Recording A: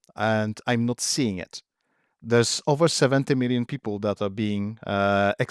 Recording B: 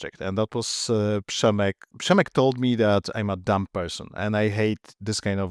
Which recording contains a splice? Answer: B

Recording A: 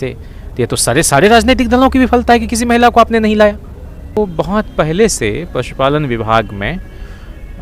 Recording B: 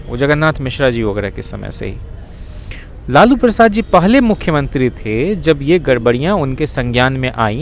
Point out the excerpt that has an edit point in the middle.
A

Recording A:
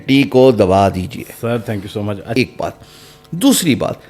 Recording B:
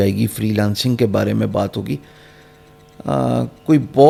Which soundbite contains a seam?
A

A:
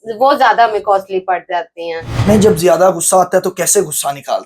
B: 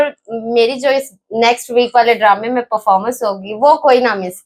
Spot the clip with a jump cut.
A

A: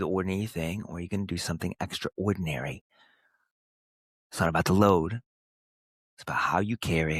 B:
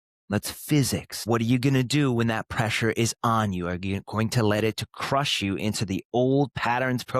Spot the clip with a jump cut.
B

